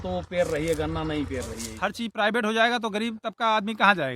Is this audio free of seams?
no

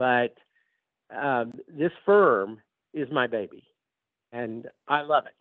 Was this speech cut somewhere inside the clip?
yes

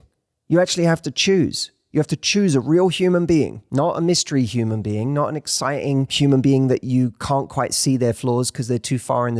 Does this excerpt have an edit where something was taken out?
yes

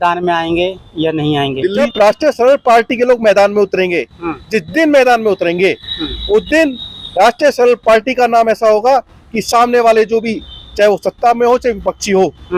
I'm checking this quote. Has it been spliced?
yes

